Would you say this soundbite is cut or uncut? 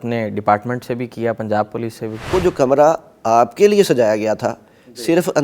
cut